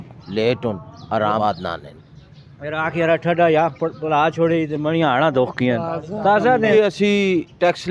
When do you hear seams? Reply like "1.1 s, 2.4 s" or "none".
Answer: 1.4 s, 6.7 s